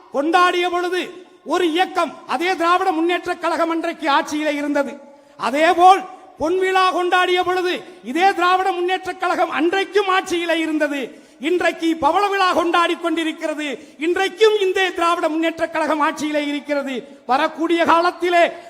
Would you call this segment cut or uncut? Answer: uncut